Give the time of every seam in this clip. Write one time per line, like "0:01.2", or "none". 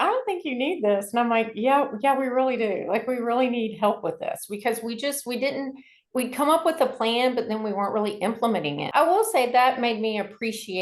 0:08.9